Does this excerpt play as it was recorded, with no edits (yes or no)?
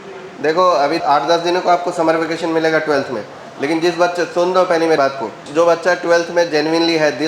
no